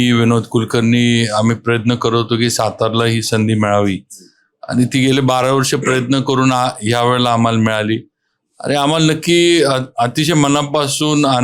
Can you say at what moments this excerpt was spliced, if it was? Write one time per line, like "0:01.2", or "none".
none

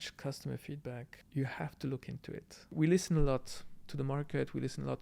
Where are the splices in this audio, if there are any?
0:01.1
0:02.7

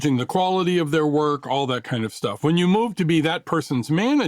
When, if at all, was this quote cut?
none

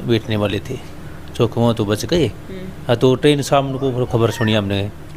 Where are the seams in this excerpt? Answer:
none

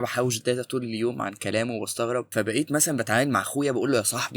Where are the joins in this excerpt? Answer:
0:02.3

